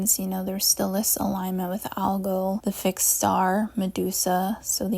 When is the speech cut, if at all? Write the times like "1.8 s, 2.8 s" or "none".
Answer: 2.6 s